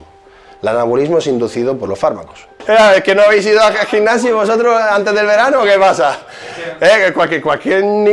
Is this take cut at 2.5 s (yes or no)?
yes